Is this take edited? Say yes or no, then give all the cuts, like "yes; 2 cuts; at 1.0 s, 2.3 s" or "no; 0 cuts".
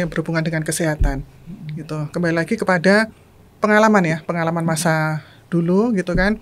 no; 0 cuts